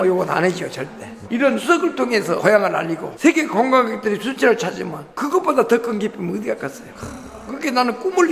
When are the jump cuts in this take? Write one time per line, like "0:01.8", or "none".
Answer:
none